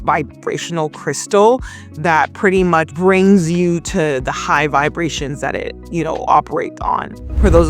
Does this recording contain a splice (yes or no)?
no